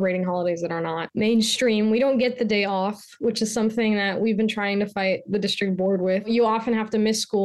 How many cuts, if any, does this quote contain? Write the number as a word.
two